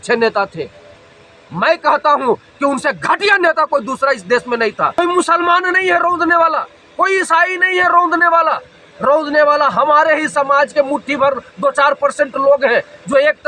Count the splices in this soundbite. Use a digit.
1